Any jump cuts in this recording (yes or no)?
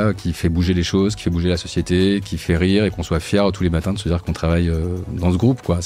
no